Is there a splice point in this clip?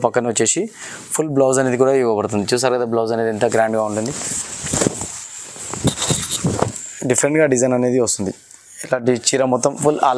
no; 0 cuts

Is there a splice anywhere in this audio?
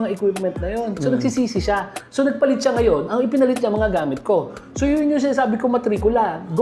no; 0 cuts

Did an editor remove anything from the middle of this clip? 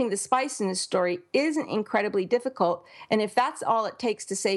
no; 0 cuts

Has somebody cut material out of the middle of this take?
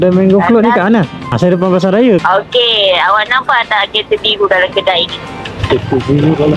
yes; 2 cuts; at 1.3 s, 2.2 s

